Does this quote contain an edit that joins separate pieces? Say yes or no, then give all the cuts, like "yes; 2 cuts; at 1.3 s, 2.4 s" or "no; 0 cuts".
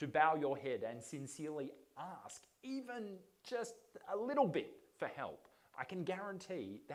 no; 0 cuts